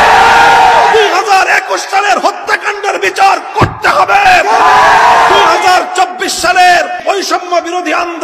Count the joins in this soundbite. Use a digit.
1